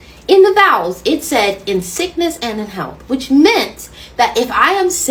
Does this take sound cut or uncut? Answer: uncut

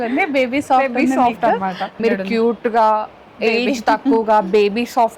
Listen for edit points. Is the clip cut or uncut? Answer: cut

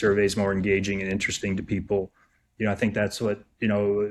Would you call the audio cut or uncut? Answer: uncut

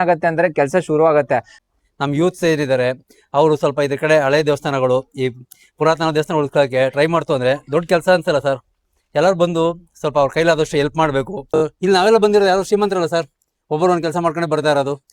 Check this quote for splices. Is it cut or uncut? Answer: cut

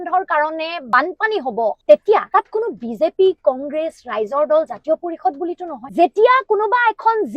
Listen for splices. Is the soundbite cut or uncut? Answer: cut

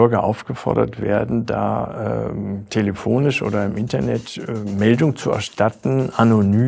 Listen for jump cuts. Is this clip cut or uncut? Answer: uncut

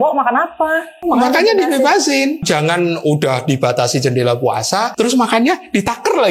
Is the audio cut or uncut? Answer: cut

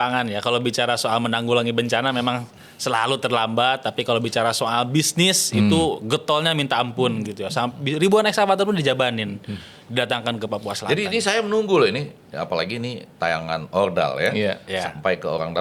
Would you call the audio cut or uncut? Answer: uncut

